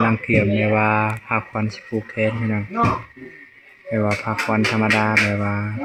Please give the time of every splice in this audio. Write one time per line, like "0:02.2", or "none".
none